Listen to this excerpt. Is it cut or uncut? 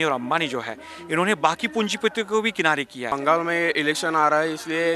cut